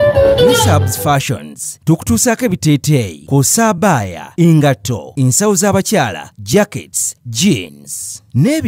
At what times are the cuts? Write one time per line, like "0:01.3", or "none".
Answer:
0:01.0